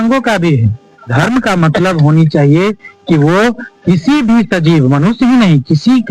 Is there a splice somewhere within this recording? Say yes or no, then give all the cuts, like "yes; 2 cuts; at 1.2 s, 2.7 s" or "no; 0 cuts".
yes; 1 cut; at 1.0 s